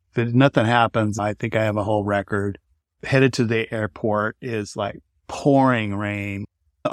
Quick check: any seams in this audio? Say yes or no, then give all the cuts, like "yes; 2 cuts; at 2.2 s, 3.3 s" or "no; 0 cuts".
no; 0 cuts